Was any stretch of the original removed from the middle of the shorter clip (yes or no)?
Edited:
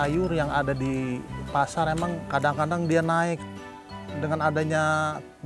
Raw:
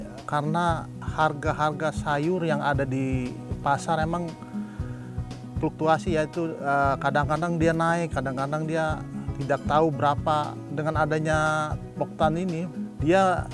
yes